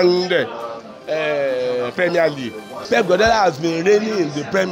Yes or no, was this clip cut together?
yes